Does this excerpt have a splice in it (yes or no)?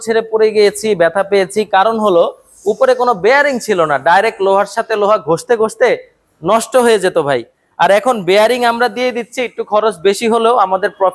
no